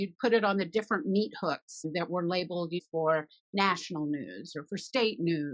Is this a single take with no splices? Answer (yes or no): yes